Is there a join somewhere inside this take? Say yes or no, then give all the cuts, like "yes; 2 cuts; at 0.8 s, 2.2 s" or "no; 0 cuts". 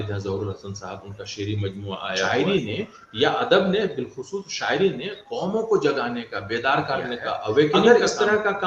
yes; 2 cuts; at 2.3 s, 7.8 s